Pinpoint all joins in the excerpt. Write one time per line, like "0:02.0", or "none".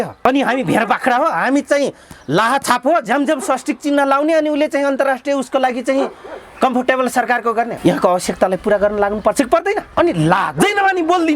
0:07.7
0:09.9